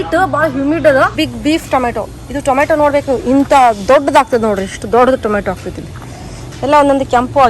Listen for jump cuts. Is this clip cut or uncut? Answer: cut